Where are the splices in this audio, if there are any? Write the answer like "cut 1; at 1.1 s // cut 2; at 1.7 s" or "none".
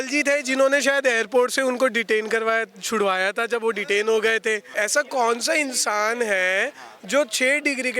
cut 1; at 4.7 s